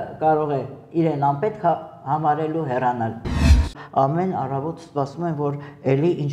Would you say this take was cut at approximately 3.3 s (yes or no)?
yes